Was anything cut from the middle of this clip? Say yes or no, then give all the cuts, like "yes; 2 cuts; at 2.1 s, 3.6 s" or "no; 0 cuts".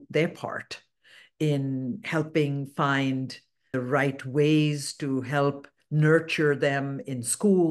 yes; 1 cut; at 3.7 s